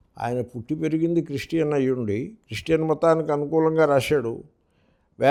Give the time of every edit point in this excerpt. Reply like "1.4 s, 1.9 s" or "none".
none